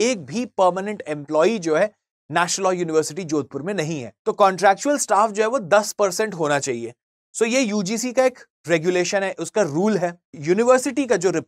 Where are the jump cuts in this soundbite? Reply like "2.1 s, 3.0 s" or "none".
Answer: 4.0 s, 10.3 s